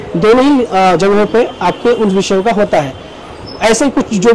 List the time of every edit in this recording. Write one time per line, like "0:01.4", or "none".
none